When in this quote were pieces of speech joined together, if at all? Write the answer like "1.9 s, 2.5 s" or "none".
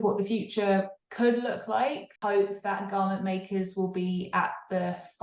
2.1 s